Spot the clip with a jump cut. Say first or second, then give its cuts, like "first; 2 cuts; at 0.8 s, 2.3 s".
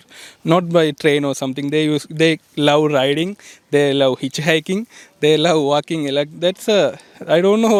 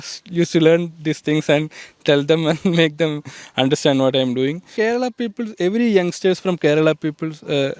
second; 1 cut; at 4.7 s